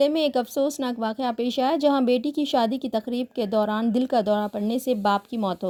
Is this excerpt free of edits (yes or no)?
yes